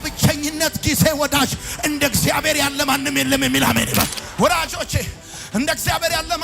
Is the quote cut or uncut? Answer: cut